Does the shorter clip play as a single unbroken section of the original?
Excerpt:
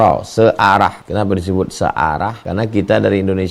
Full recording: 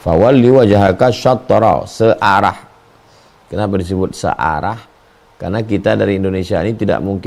no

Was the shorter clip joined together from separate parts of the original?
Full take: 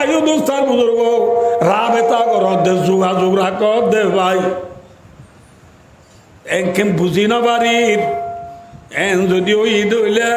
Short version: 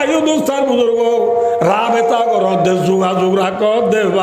no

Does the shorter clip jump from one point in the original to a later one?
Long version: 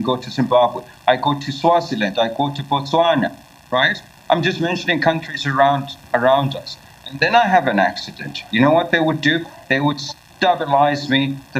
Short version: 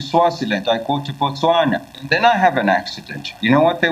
yes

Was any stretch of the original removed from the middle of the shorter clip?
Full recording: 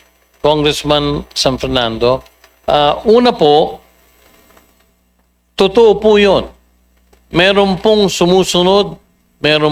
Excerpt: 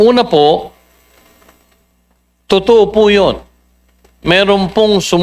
no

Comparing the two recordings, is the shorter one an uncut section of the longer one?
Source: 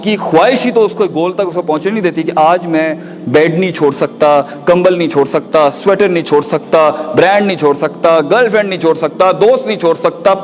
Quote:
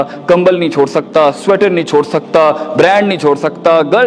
yes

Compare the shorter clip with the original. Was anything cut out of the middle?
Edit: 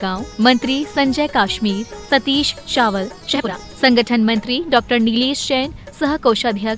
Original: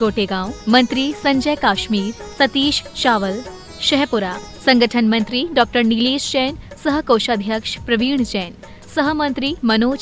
yes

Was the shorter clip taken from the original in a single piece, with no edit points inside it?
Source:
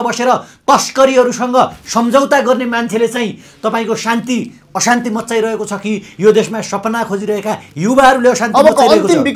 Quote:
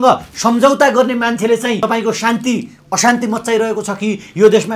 no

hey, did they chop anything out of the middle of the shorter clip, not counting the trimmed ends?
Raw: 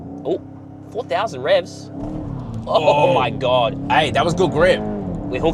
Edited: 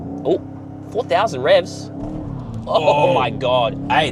no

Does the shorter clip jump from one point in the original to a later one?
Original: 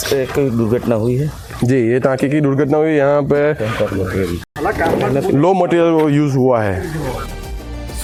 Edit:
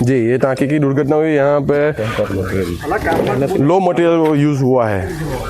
yes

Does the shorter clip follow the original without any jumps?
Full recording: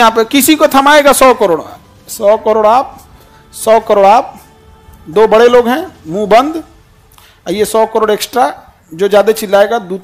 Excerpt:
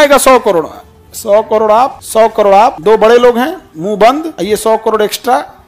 no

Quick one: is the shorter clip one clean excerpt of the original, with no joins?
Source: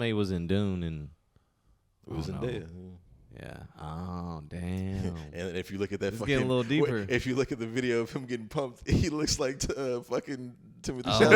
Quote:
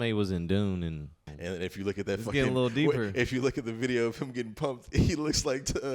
no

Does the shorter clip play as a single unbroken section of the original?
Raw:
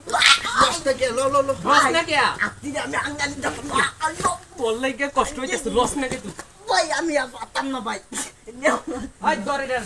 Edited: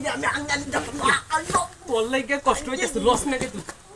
yes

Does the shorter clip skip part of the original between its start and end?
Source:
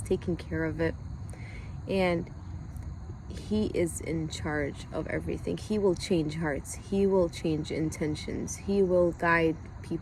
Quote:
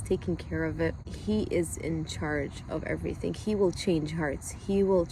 yes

